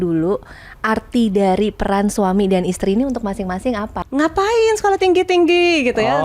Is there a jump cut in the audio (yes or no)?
yes